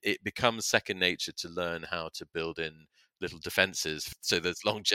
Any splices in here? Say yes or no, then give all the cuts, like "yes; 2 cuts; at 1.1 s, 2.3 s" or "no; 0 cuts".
yes; 1 cut; at 4.1 s